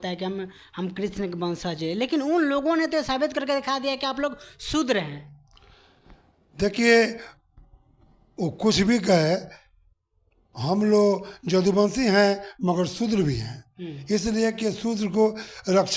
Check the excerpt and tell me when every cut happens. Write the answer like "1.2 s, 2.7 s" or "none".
none